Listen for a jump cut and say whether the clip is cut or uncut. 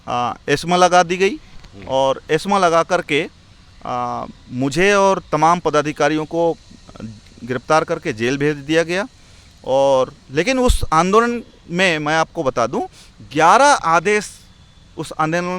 uncut